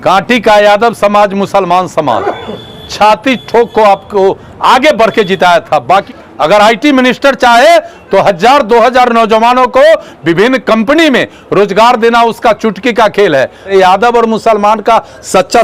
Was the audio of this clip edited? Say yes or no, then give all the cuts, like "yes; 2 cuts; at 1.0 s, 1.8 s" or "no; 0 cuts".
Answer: yes; 2 cuts; at 6.1 s, 13.7 s